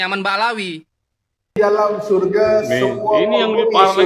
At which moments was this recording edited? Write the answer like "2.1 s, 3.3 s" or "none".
1.5 s